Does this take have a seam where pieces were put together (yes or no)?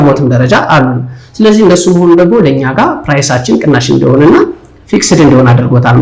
no